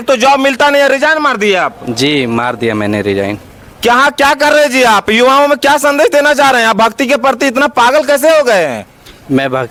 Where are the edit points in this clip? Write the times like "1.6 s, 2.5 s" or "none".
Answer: none